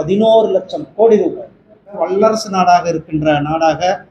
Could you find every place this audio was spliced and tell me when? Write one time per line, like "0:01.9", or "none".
0:02.0